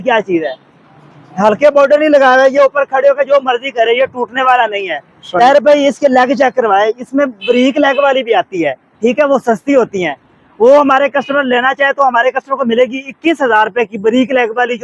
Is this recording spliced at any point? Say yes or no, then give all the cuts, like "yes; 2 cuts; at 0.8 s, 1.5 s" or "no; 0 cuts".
no; 0 cuts